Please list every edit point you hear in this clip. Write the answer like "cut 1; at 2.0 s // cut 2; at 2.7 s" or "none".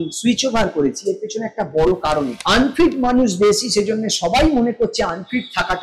cut 1; at 2.4 s

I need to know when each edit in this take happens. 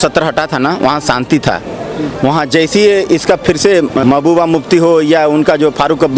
cut 1; at 4.0 s

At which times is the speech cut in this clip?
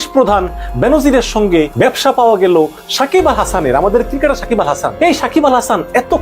cut 1; at 1.7 s // cut 2; at 4.9 s

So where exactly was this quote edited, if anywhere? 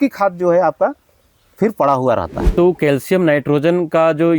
cut 1; at 2.4 s

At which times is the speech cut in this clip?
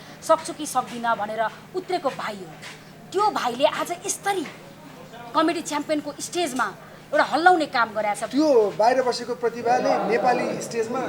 cut 1; at 8.2 s

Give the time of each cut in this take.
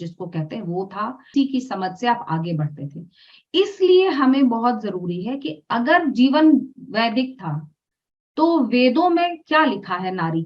cut 1; at 1.2 s

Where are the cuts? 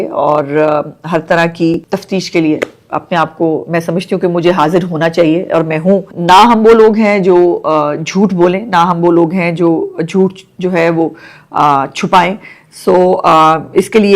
cut 1; at 1.8 s // cut 2; at 6.1 s

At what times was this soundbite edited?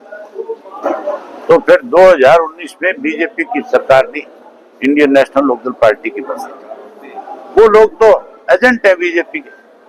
none

